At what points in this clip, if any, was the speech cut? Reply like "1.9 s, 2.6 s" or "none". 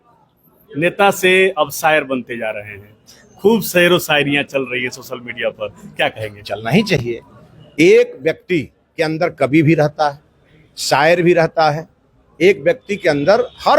none